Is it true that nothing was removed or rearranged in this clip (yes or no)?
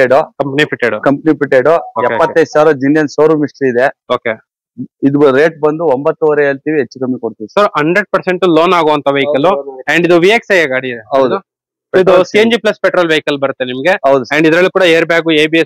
yes